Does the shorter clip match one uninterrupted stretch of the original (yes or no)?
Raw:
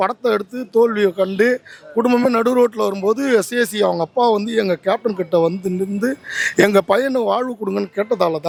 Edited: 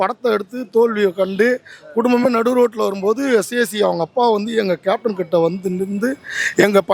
yes